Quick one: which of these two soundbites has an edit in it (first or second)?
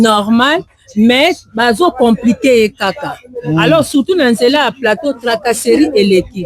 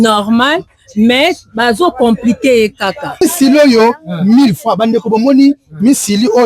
second